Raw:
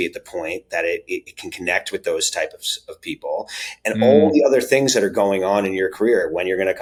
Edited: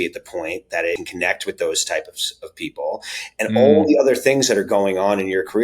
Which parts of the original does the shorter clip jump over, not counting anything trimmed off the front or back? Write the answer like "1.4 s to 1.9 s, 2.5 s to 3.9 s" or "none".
1.0 s to 1.5 s

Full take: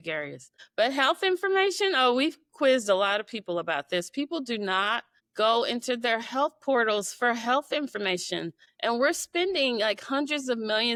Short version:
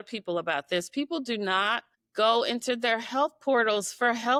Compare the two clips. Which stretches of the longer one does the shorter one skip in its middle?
none

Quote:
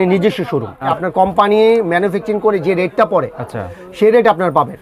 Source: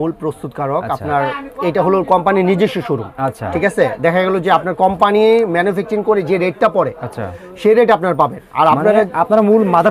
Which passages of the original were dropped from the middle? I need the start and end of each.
3.3 s to 4.6 s

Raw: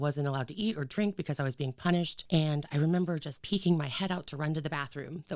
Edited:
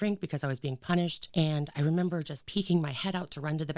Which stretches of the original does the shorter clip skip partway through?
none

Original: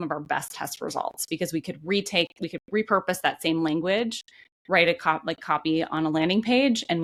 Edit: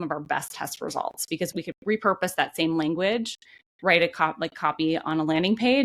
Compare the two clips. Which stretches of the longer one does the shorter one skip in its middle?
1.5 s to 2.4 s

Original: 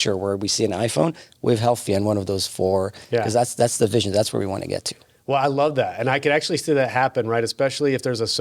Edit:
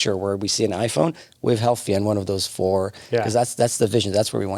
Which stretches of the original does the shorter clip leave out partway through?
none

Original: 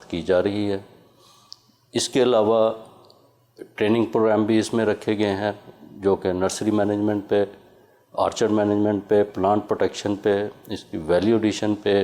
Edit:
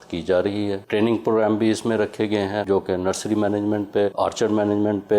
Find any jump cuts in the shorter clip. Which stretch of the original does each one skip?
0.8 s to 3.7 s, 5.5 s to 6.0 s, 7.5 s to 8.1 s

